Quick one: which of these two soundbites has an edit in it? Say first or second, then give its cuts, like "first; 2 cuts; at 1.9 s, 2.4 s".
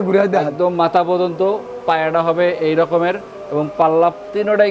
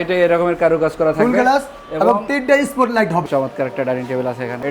second; 1 cut; at 3.3 s